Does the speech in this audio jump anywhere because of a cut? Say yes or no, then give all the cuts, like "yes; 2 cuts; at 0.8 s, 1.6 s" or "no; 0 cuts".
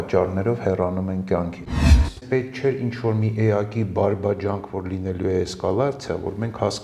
yes; 1 cut; at 1.8 s